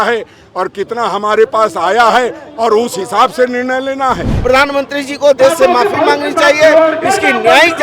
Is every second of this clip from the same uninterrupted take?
no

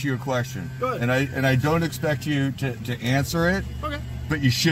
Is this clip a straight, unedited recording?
yes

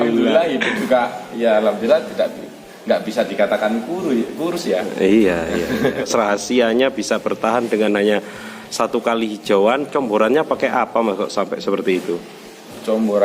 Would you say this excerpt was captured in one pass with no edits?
no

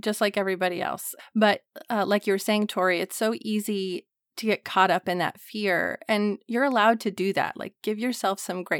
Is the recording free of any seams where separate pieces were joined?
no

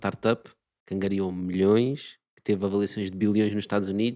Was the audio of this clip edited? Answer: no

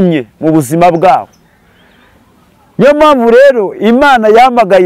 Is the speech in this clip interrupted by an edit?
no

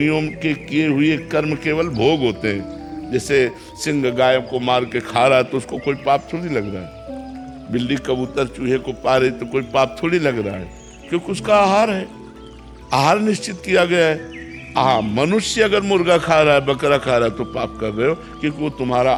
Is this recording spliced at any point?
no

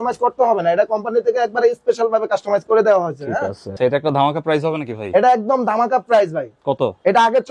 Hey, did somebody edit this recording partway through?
yes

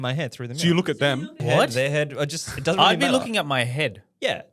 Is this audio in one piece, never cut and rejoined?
no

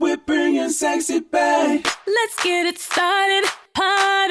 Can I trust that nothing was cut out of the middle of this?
yes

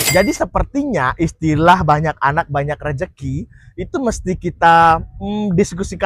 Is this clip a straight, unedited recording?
yes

